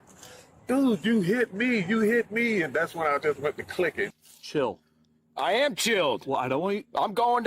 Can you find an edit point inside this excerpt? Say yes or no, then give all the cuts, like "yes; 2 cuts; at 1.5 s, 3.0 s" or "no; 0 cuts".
yes; 1 cut; at 4.2 s